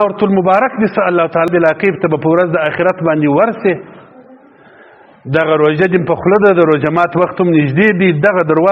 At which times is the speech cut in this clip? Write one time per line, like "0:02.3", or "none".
0:01.5